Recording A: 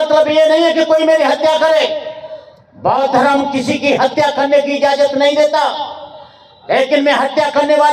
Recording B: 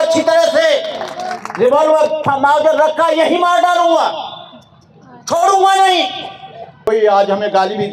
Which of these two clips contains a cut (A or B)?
B